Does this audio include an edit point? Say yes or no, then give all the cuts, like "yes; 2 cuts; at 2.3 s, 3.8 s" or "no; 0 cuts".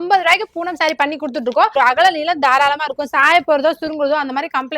yes; 1 cut; at 1.7 s